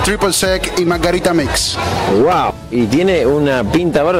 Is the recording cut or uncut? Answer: uncut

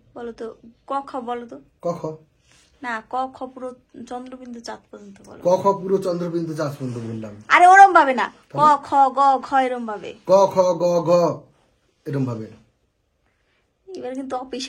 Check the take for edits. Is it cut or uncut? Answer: uncut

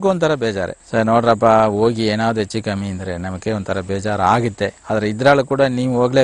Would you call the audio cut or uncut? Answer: uncut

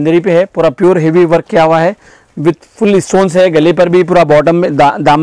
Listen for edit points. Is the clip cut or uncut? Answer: uncut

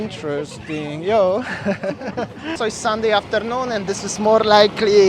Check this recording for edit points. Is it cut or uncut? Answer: cut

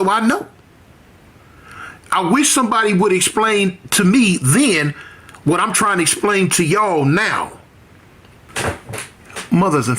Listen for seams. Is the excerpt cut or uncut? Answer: cut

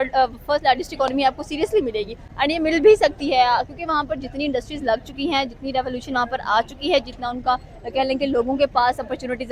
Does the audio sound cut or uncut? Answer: uncut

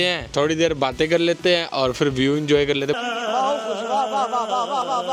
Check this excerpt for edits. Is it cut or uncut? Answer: uncut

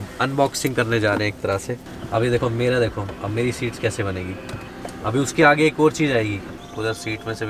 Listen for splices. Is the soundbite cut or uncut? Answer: cut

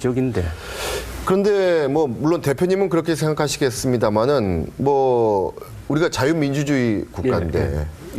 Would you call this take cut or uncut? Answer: cut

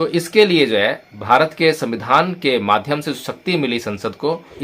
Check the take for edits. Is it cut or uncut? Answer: uncut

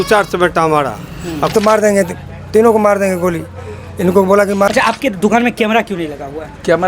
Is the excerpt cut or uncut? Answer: cut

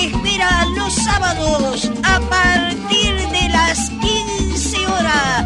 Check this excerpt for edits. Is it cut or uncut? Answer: uncut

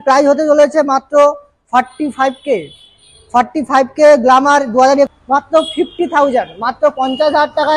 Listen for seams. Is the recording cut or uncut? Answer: cut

